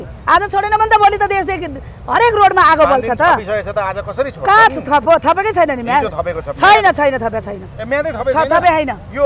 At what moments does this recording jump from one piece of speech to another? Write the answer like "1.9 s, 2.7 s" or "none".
none